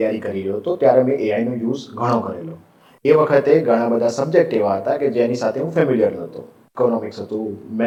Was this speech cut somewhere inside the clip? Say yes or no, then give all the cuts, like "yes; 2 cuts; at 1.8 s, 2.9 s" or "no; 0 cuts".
no; 0 cuts